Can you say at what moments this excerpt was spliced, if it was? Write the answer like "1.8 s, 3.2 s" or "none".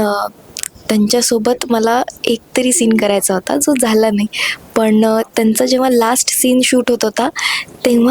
none